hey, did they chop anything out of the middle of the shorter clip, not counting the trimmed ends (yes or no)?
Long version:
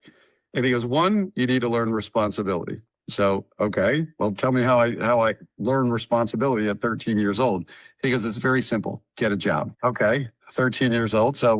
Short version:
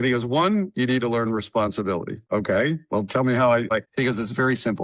yes